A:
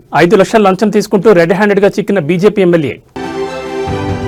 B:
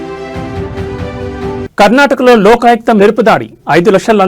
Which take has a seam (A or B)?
B